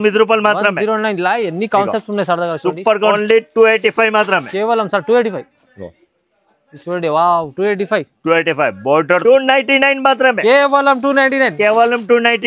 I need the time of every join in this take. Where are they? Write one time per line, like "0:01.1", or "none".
0:03.1
0:09.2